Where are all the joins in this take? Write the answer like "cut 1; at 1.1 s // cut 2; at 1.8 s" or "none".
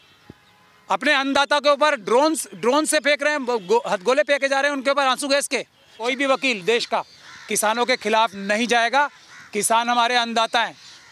cut 1; at 6.0 s